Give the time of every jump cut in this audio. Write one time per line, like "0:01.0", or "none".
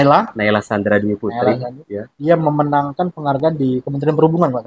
none